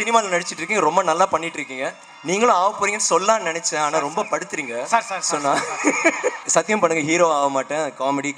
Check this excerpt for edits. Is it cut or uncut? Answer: cut